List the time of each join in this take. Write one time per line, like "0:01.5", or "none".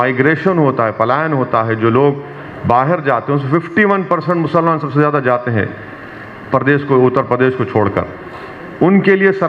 none